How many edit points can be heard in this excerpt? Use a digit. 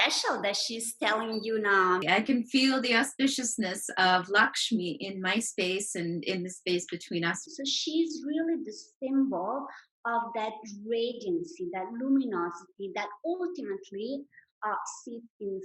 2